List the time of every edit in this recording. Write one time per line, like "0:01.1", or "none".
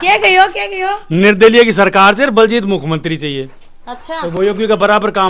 none